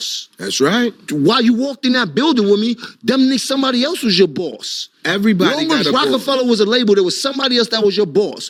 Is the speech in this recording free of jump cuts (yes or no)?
yes